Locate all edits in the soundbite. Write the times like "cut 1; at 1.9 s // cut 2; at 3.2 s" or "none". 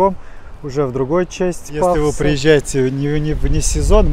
cut 1; at 2.0 s